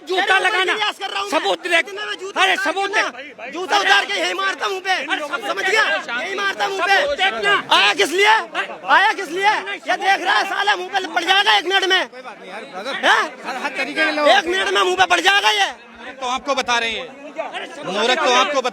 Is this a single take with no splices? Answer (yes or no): yes